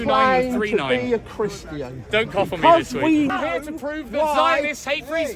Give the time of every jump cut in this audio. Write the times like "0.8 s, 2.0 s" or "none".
1.9 s, 3.3 s